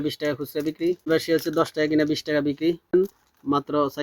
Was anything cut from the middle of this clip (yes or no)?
yes